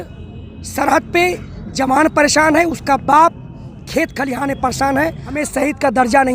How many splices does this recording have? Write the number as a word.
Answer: one